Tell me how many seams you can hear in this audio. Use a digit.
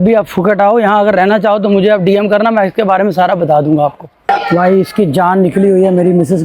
1